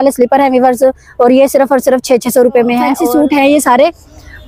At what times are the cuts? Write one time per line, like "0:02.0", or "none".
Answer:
0:03.0